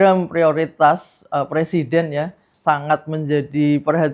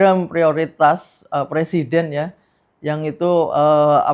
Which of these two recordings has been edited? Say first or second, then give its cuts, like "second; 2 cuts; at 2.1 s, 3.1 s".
first; 1 cut; at 2.4 s